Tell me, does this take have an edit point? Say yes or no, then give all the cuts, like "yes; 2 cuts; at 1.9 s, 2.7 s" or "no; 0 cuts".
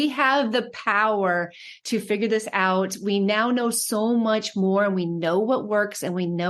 no; 0 cuts